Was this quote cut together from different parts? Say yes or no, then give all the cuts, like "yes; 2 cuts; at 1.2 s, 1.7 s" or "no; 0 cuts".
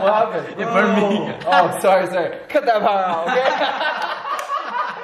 no; 0 cuts